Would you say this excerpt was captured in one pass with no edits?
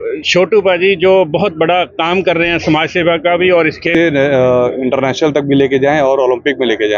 no; 1 cut; at 3.9 s

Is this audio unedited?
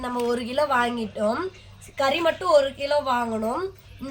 yes; 0 cuts

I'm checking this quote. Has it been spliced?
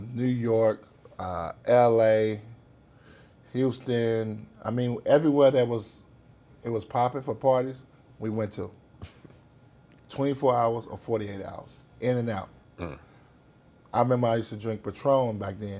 no; 0 cuts

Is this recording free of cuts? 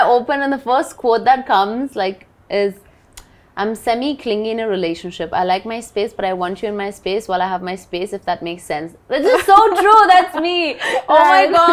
yes; 0 cuts

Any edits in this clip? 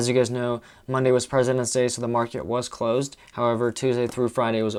no; 0 cuts

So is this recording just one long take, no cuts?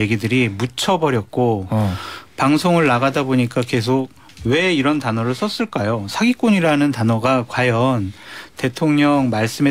yes; 0 cuts

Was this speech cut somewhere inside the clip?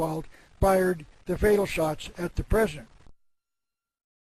no; 0 cuts

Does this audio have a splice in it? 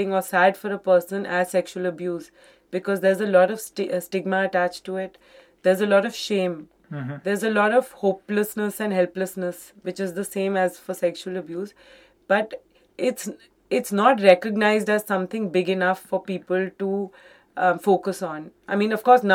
no; 0 cuts

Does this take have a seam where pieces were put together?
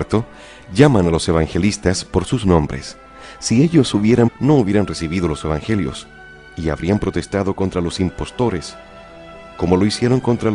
no; 0 cuts

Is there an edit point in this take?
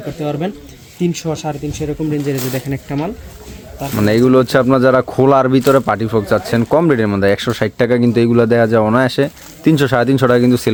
no; 0 cuts

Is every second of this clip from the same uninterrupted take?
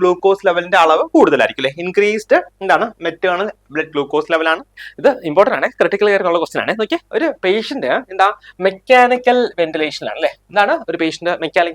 no; 1 cut; at 4.9 s

